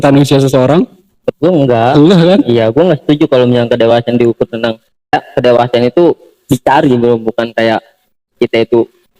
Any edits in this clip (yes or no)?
yes